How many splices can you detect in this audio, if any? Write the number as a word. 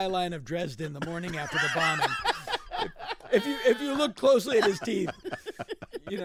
zero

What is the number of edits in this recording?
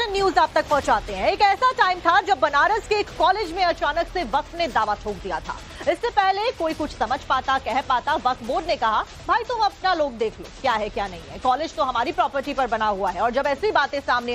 one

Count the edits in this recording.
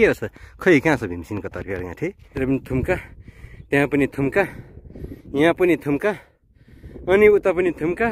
one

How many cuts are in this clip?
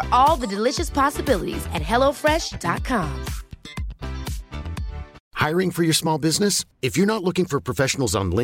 one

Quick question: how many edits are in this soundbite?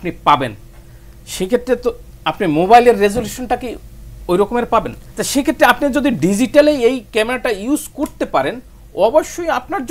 one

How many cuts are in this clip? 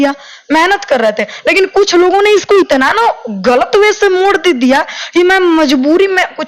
zero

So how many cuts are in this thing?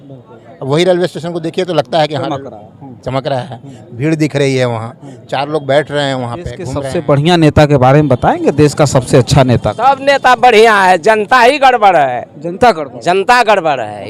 one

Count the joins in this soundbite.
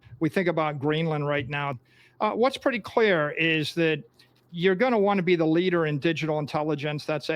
one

